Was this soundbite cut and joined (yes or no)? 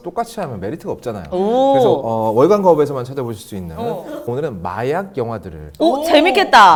no